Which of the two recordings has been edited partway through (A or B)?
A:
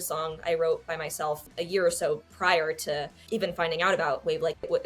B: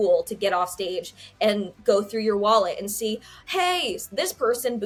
A